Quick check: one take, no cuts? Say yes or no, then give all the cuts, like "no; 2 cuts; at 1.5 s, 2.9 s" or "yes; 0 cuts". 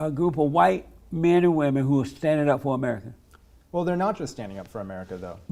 yes; 0 cuts